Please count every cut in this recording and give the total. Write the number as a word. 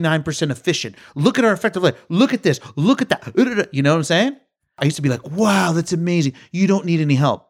one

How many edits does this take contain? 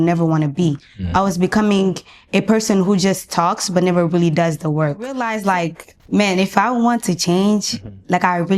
one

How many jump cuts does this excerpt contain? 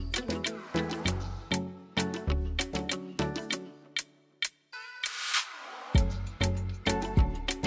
zero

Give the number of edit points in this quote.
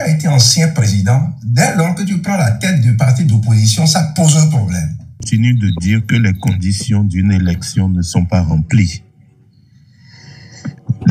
one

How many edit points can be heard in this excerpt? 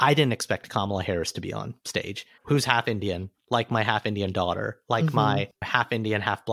two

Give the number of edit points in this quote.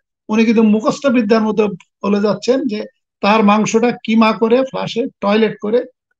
zero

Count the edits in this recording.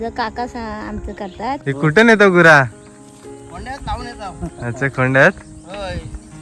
one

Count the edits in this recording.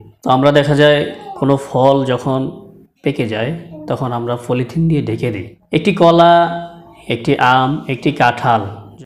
one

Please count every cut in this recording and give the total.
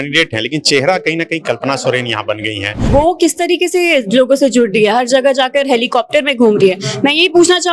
one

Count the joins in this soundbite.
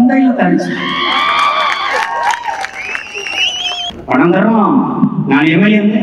one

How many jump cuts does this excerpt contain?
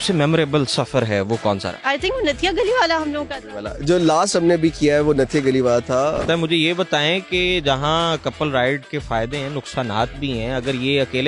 two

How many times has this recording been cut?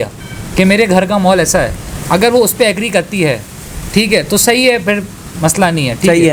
zero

